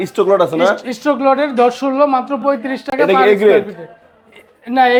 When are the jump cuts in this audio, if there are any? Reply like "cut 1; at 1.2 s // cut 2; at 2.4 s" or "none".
none